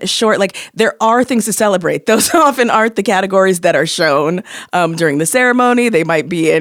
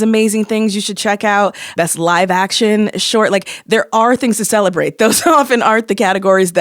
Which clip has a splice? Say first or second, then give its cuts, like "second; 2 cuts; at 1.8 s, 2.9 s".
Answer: second; 1 cut; at 1.7 s